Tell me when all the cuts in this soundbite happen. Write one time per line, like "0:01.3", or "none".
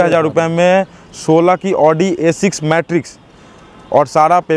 none